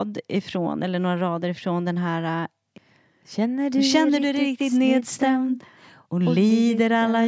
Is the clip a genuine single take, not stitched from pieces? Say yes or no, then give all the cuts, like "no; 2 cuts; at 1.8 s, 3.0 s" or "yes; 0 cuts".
no; 1 cut; at 2.6 s